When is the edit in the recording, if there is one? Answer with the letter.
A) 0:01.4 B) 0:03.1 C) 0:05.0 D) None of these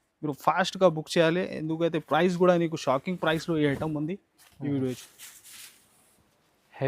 C